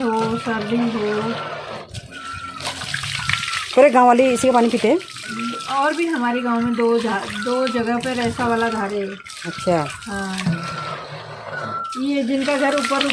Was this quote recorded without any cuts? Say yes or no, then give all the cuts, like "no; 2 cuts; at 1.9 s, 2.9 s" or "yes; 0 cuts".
yes; 0 cuts